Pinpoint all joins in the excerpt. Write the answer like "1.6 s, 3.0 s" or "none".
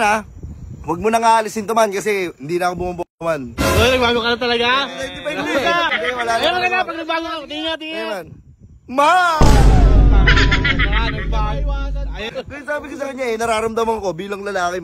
5.9 s, 12.3 s